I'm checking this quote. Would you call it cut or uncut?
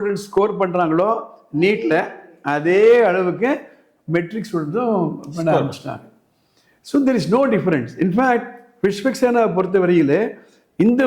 uncut